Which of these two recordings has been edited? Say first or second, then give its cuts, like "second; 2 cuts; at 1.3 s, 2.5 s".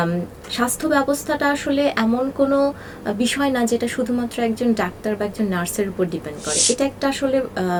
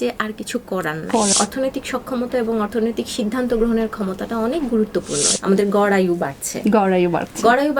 second; 2 cuts; at 1.3 s, 5.3 s